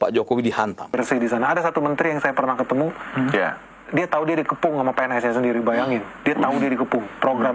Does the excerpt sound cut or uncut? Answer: cut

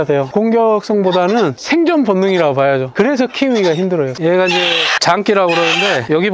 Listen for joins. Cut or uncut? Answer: cut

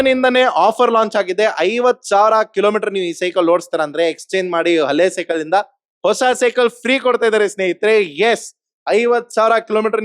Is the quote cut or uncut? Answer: uncut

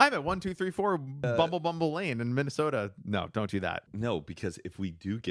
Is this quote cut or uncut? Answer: cut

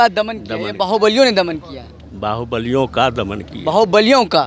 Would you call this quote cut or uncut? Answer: uncut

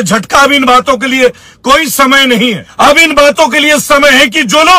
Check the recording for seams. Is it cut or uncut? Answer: cut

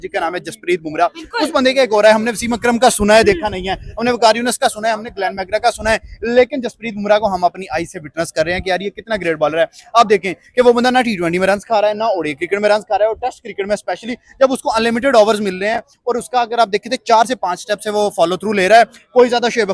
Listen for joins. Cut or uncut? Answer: uncut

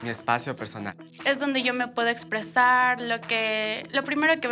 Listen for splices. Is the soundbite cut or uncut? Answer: cut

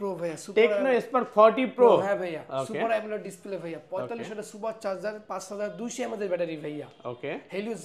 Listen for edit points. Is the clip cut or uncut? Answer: uncut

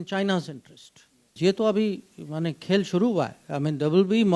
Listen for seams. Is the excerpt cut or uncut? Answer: cut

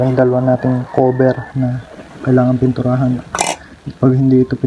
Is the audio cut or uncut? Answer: uncut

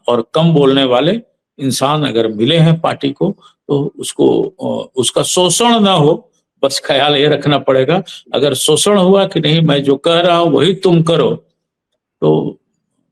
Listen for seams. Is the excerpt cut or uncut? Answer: uncut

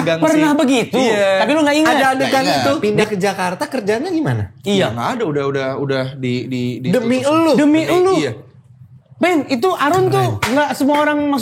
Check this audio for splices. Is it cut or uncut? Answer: cut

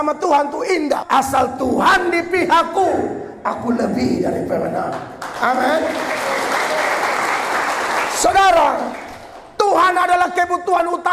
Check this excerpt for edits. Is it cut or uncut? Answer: cut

